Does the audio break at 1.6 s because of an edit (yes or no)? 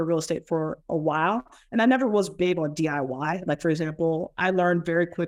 no